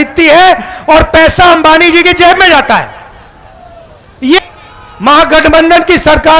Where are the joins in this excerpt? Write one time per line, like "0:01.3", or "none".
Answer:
0:04.4